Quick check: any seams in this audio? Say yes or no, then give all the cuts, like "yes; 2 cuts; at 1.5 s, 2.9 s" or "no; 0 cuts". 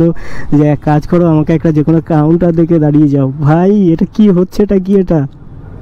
no; 0 cuts